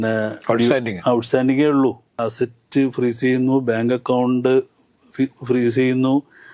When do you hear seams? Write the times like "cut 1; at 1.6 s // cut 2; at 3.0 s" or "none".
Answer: cut 1; at 2.2 s